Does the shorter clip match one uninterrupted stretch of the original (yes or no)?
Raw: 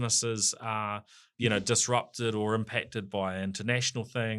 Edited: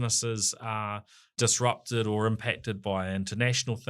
no